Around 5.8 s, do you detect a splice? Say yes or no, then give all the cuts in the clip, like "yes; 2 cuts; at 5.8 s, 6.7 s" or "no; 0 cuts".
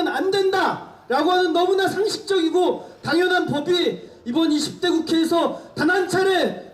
no; 1 cut; at 4.1 s